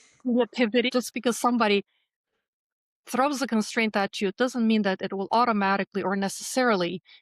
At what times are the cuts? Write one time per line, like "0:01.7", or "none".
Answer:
0:00.9